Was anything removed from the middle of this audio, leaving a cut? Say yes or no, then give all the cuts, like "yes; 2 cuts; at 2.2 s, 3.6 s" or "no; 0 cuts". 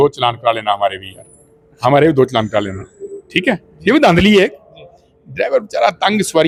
no; 0 cuts